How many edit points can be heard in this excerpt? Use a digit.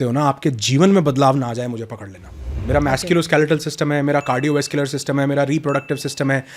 1